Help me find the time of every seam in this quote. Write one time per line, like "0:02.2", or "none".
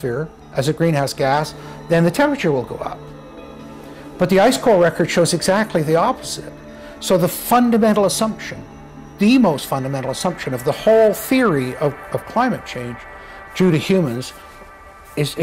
none